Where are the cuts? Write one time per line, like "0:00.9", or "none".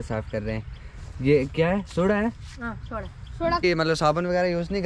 0:03.6

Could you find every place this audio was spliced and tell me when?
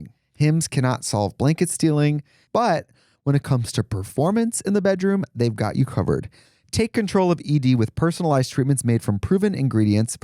0:02.4

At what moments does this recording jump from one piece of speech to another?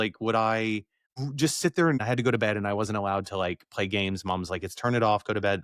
0:01.0
0:02.0

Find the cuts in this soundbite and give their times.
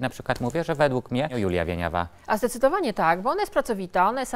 0:01.3

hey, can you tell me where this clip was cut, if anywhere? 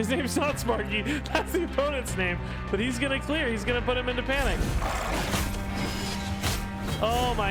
none

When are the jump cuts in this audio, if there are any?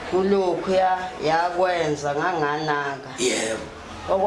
none

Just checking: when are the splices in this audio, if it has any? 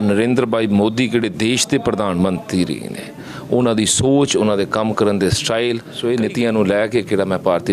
0:05.9

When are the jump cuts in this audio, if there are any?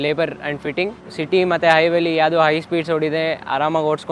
0:01.0

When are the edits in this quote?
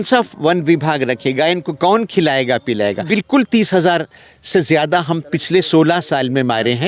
0:03.1

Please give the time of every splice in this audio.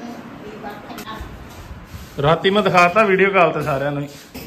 0:01.0

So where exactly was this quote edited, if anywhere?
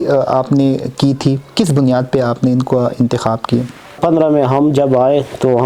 0:04.0

